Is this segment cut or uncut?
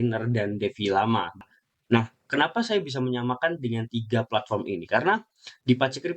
cut